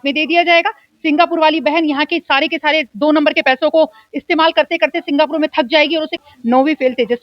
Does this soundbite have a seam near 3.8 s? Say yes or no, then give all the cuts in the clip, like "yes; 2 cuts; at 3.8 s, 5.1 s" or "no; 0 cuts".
no; 1 cut; at 6.1 s